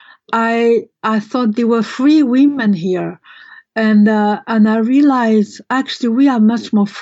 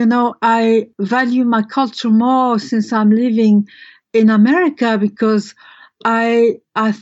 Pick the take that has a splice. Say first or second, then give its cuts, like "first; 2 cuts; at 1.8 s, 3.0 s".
second; 1 cut; at 0.9 s